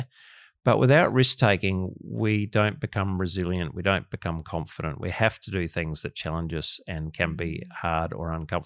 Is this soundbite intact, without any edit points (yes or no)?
yes